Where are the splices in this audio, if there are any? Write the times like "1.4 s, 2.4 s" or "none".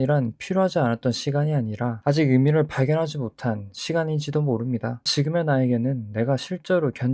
5.1 s